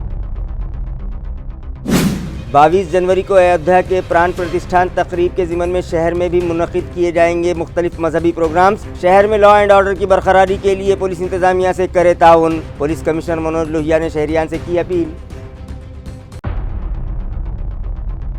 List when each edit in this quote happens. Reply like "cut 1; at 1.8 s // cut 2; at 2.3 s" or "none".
cut 1; at 2.3 s